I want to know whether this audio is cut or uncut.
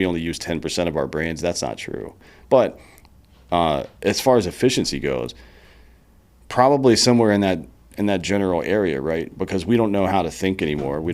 cut